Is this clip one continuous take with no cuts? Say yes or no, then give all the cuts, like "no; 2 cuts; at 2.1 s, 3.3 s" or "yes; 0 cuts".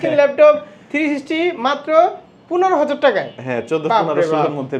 yes; 0 cuts